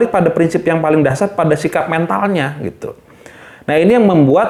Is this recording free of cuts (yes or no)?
yes